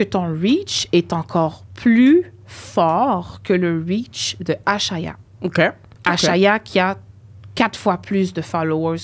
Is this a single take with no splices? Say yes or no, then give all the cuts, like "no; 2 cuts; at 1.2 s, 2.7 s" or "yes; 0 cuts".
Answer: no; 1 cut; at 5.9 s